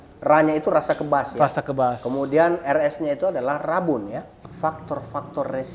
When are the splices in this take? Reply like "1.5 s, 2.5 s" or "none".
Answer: 4.3 s